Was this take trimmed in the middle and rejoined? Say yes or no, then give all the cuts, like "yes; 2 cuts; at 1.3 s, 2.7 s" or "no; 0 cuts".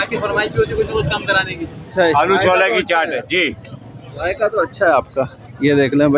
yes; 1 cut; at 2.1 s